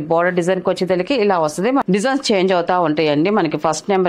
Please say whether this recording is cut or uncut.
cut